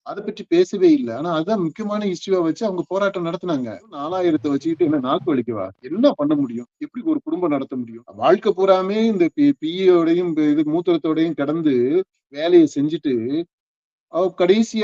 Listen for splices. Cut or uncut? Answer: cut